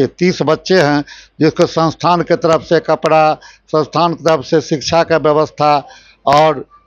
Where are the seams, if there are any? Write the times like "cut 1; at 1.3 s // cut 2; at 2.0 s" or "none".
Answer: none